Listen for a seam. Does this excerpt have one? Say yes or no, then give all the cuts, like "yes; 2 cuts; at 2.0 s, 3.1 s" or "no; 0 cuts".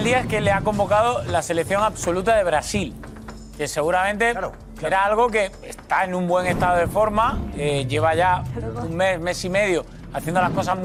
no; 0 cuts